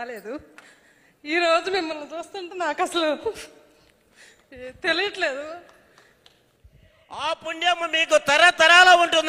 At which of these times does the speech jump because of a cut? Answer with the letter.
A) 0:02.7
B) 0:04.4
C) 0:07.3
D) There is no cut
C